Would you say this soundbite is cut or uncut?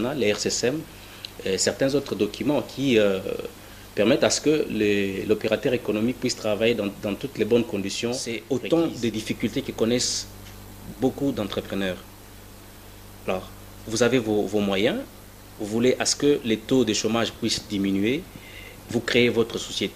cut